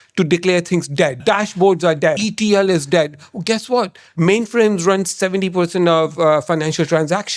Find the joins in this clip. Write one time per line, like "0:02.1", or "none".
0:01.2
0:02.2